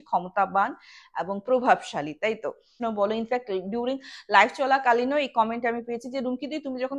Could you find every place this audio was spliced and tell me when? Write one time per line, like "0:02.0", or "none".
0:02.7